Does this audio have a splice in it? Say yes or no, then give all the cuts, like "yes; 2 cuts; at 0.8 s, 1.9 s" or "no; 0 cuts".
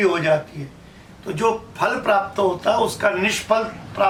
no; 0 cuts